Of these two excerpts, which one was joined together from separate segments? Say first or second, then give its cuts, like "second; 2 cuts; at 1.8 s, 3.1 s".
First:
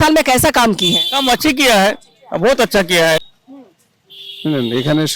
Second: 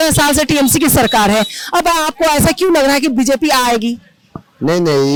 first; 1 cut; at 3.3 s